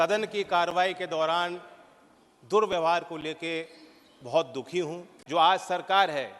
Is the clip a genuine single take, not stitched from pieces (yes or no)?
no